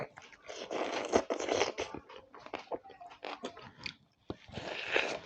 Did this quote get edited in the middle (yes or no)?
yes